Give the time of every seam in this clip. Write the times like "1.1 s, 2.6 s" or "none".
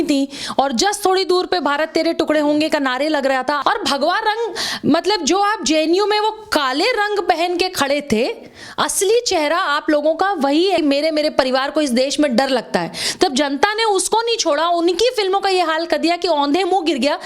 3.6 s, 10.8 s